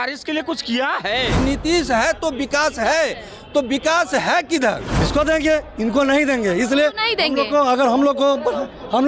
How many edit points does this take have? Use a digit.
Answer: 2